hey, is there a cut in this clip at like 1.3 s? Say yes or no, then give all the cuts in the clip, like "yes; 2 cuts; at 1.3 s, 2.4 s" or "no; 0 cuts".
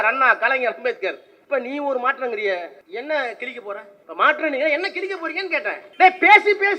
yes; 4 cuts; at 1.3 s, 2.8 s, 4.0 s, 5.8 s